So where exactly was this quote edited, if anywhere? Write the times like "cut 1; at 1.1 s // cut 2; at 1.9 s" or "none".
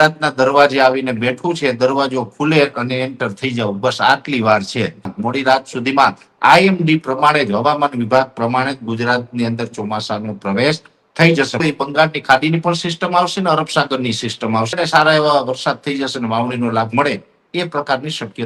cut 1; at 5.2 s // cut 2; at 11.6 s // cut 3; at 14.8 s